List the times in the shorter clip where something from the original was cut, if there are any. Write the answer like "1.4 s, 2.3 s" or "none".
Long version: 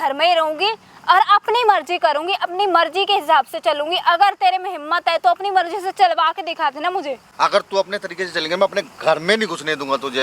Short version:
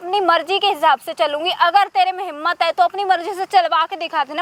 none